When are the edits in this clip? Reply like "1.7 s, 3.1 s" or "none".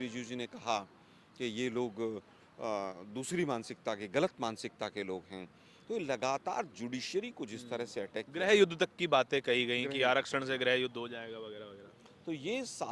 none